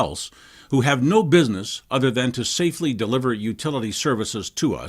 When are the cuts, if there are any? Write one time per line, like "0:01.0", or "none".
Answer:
0:03.2